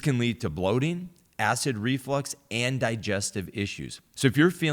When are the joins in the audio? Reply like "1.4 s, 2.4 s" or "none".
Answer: none